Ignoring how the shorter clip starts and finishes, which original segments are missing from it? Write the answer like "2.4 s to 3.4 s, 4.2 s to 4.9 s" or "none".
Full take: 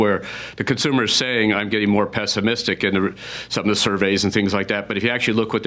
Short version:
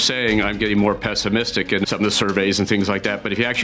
3.0 s to 3.5 s